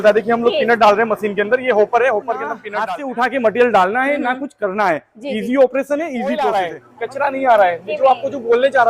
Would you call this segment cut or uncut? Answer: cut